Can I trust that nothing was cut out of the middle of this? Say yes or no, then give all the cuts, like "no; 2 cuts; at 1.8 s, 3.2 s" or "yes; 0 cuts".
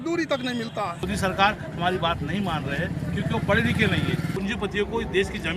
no; 2 cuts; at 1.1 s, 4.3 s